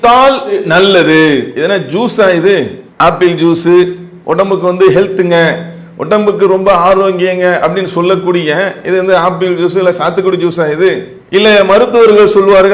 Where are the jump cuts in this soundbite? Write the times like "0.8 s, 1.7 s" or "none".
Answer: none